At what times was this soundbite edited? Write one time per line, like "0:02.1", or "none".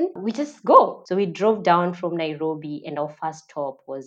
0:01.0